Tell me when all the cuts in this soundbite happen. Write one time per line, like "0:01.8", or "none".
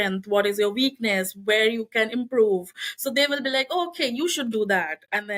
none